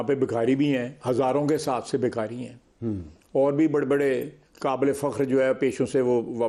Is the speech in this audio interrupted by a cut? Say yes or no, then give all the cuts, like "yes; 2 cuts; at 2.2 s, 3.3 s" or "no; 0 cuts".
no; 0 cuts